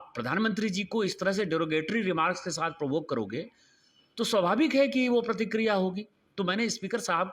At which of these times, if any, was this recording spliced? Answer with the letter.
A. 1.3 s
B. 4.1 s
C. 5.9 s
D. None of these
D